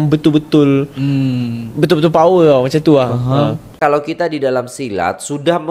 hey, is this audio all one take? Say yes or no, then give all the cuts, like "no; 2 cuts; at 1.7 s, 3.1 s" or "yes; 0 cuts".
no; 1 cut; at 3.8 s